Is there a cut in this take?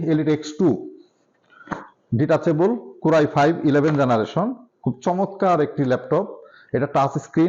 no; 0 cuts

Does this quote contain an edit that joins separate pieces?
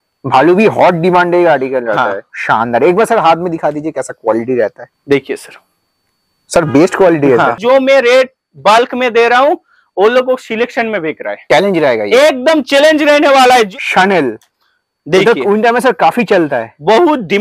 yes; 5 cuts; at 2.3 s, 4.9 s, 7.6 s, 11.3 s, 13.7 s

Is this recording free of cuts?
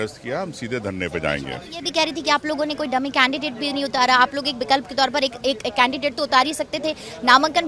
yes; 0 cuts

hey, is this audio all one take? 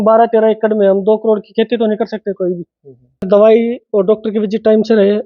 no; 1 cut; at 3.3 s

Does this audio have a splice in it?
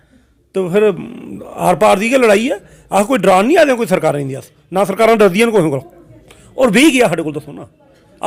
no; 0 cuts

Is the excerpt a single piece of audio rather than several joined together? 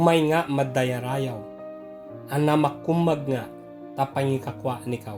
yes; 0 cuts

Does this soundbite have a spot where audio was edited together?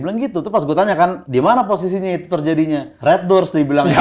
yes; 2 cuts; at 1.2 s, 2.9 s

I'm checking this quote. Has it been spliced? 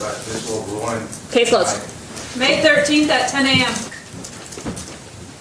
no; 0 cuts

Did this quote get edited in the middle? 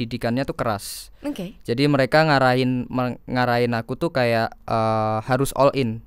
no; 0 cuts

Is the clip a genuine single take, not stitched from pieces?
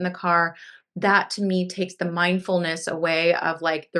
yes; 0 cuts

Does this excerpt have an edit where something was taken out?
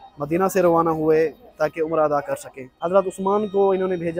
yes; 1 cut; at 2.8 s

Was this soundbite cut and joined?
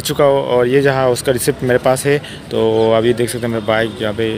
no; 0 cuts

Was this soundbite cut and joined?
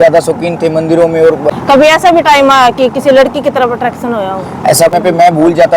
yes; 2 cuts; at 1.5 s, 4.9 s

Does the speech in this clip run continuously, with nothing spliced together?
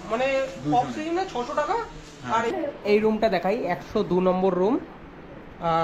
no; 1 cut; at 2.5 s

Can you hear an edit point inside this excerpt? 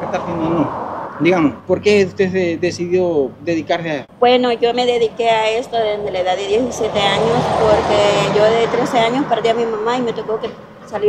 yes; 3 cuts; at 1.0 s, 1.6 s, 4.1 s

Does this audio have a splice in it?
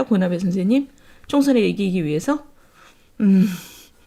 no; 0 cuts

